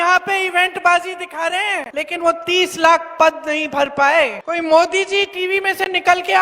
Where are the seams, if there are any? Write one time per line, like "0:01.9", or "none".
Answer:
0:01.9
0:04.4